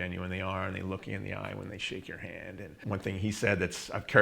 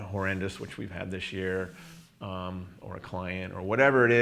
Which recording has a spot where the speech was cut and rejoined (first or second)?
first